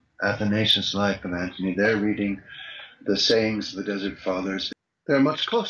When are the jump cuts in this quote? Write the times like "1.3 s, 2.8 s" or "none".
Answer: 4.7 s